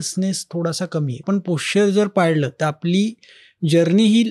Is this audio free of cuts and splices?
no; 1 cut; at 1.2 s

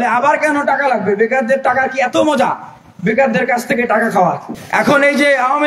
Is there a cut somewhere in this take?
yes; 1 cut; at 4.5 s

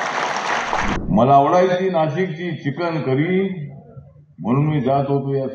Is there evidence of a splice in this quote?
yes; 1 cut; at 0.9 s

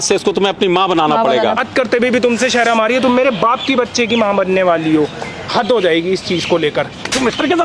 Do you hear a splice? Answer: yes; 2 cuts; at 1.6 s, 5.5 s

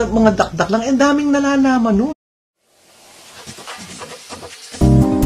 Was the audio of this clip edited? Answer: no; 0 cuts

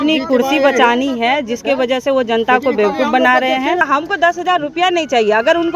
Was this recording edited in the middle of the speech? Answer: yes; 1 cut; at 3.8 s

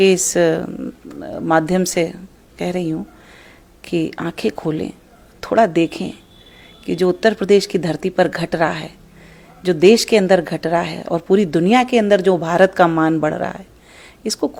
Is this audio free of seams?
yes; 0 cuts

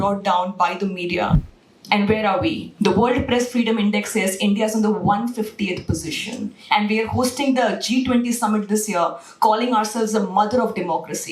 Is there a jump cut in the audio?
yes; 1 cut; at 1.4 s

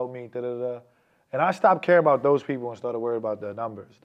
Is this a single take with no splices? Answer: yes; 0 cuts

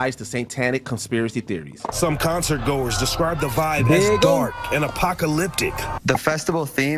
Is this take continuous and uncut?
yes; 0 cuts

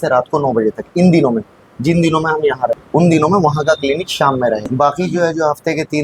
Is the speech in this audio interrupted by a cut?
yes; 2 cuts; at 2.8 s, 4.7 s

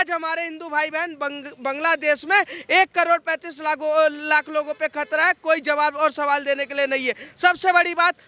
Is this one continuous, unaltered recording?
yes; 0 cuts

